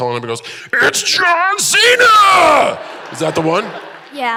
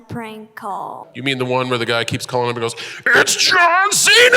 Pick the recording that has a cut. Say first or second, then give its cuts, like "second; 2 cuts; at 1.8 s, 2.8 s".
second; 1 cut; at 1.0 s